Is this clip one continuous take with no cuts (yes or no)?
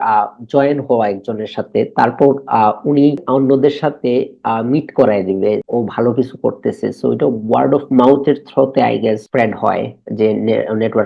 no